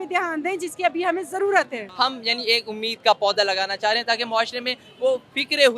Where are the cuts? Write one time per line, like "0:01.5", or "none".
0:01.8